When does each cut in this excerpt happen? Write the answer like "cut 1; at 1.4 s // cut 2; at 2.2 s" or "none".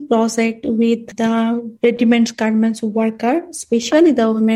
cut 1; at 1.1 s